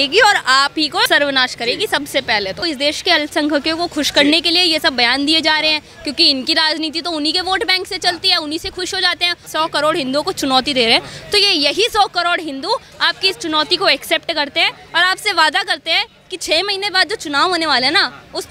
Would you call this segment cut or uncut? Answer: cut